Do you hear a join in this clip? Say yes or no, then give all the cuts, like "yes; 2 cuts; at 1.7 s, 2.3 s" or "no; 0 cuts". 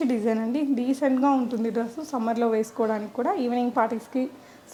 no; 0 cuts